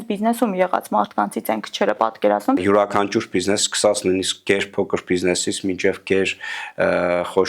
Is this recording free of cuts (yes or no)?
no